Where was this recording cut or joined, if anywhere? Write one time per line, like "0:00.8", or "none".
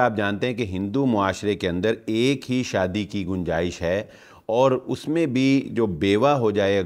none